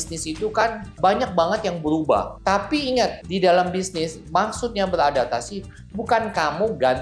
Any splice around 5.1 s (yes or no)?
no